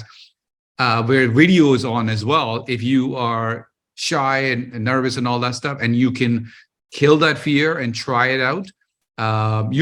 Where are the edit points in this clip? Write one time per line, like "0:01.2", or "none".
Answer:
none